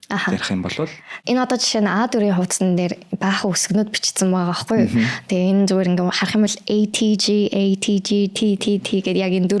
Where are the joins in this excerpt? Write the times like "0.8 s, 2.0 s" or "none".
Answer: 1.1 s